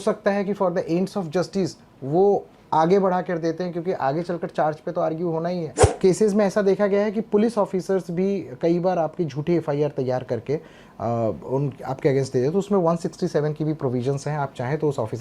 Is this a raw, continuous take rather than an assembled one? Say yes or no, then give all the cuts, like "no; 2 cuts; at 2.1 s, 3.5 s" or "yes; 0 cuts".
no; 1 cut; at 5.8 s